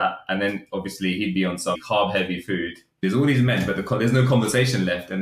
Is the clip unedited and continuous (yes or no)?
no